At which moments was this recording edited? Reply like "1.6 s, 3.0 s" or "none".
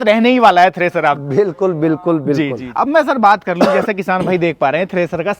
2.6 s